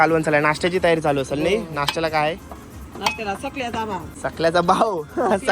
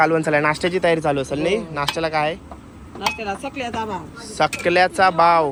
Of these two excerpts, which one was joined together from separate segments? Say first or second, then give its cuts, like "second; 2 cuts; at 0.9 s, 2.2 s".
first; 1 cut; at 4.1 s